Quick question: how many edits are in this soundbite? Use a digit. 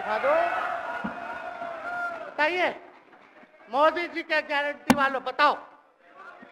0